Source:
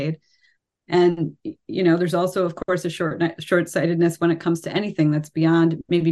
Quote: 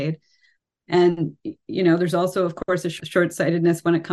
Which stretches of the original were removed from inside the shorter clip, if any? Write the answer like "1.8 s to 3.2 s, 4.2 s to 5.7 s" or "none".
3.0 s to 3.4 s